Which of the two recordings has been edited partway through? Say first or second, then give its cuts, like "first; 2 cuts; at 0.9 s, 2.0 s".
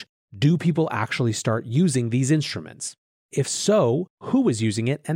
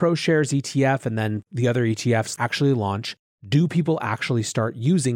first; 1 cut; at 3.3 s